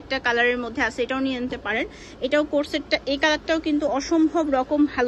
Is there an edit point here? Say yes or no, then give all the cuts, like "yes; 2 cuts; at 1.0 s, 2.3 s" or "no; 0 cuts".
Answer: no; 0 cuts